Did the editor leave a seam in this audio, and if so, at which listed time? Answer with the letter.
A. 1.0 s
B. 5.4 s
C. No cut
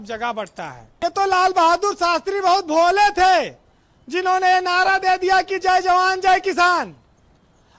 A